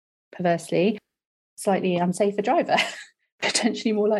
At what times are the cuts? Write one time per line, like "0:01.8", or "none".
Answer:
none